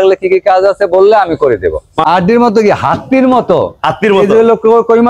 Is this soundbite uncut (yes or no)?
no